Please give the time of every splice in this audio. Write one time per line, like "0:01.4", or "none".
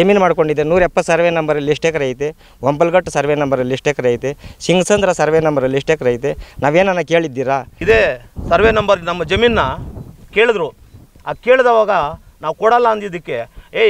0:07.7